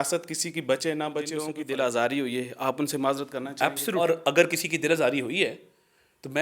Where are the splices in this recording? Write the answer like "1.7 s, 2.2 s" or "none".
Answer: 1.6 s, 4.0 s